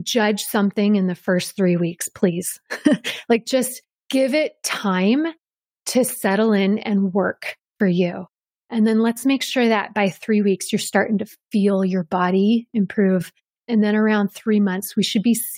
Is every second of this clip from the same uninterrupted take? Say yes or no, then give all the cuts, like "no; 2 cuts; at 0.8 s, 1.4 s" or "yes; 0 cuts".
no; 1 cut; at 4.1 s